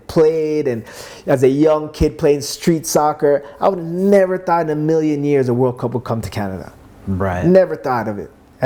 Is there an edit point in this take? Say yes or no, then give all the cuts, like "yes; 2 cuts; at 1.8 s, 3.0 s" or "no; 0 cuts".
no; 0 cuts